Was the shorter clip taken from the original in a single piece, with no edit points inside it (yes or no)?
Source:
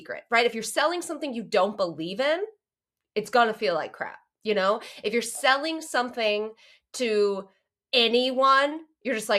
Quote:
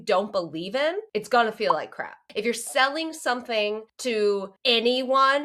no